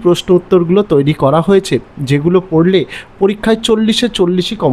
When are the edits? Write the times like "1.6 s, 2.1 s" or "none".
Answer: 3.4 s